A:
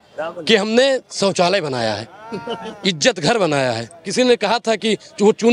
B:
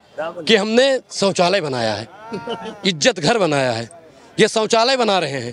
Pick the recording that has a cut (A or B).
A